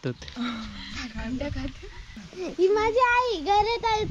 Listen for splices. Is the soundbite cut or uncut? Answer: cut